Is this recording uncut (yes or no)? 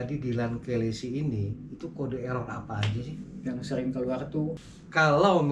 no